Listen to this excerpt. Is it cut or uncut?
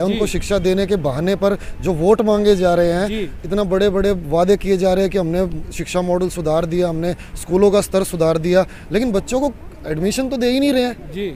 uncut